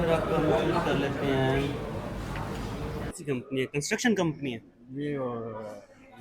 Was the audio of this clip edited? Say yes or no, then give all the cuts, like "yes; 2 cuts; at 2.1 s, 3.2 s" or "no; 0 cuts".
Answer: yes; 1 cut; at 3.2 s